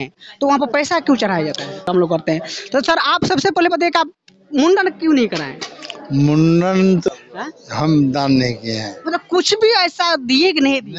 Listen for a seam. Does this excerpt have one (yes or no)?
yes